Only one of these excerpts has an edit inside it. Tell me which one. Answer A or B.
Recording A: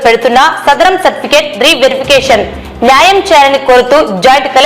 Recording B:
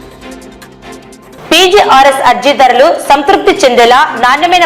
B